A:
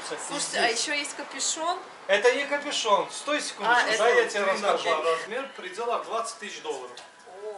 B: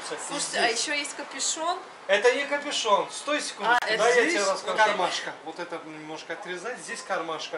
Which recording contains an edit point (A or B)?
A